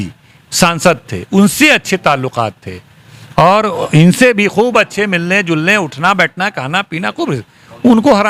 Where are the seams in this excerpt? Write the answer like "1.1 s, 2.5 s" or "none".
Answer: none